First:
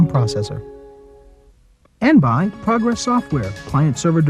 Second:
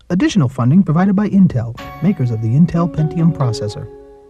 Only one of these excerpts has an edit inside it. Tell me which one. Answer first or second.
first